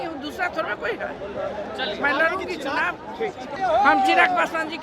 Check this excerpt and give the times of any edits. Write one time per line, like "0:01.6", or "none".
0:03.6